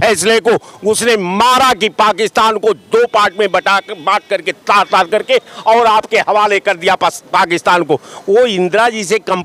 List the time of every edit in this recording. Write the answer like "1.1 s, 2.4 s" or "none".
none